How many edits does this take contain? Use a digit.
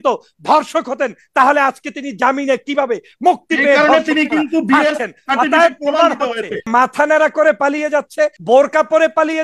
2